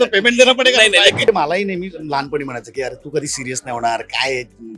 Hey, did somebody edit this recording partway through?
yes; 1 cut; at 1.3 s

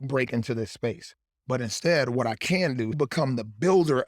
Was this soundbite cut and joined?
yes; 1 cut; at 3.0 s

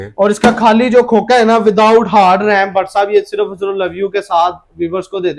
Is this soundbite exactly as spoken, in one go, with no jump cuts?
yes; 0 cuts

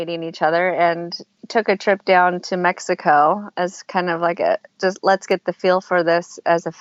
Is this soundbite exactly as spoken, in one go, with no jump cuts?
yes; 0 cuts

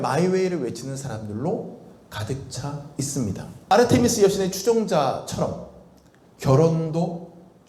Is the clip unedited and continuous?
no; 1 cut; at 3.7 s

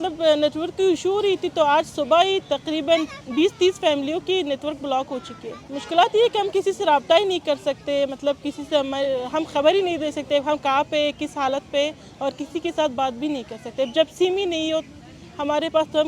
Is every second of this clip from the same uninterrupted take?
yes; 0 cuts

